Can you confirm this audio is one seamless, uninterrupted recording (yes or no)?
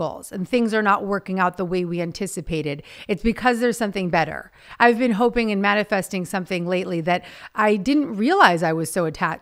yes